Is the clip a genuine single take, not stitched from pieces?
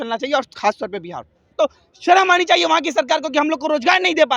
no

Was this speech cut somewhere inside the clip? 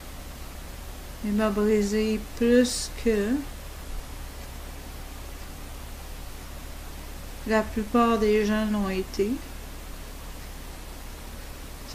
yes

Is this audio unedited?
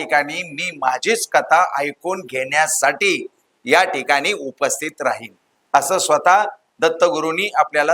yes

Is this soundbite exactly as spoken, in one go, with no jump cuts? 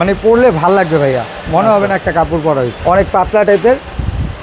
no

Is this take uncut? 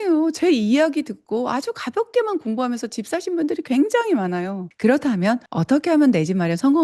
no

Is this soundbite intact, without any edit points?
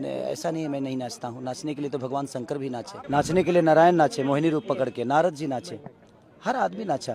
no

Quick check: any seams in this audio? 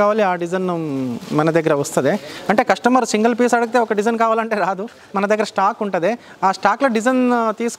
no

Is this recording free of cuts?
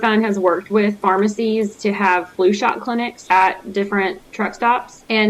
yes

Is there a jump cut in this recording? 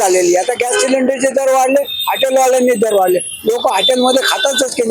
no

